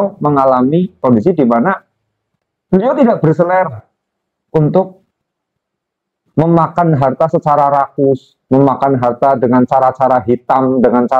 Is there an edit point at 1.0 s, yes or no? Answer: yes